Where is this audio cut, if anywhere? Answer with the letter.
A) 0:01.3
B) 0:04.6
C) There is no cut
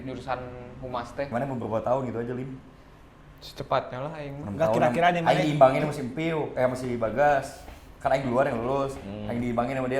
A